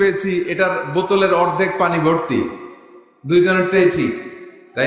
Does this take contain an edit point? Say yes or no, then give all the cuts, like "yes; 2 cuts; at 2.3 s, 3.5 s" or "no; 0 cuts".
no; 0 cuts